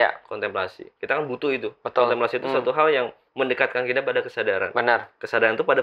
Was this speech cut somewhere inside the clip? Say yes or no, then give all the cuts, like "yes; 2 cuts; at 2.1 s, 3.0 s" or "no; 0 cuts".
no; 0 cuts